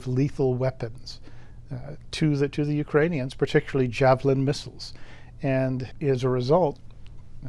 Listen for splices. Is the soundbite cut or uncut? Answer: uncut